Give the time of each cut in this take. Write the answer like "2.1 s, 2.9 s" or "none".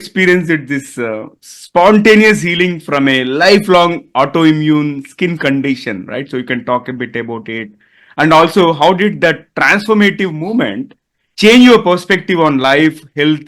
none